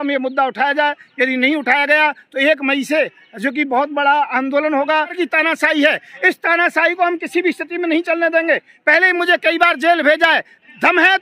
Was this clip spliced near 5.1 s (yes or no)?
yes